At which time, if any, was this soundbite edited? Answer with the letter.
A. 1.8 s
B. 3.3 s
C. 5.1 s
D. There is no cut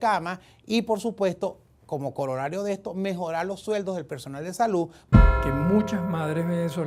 C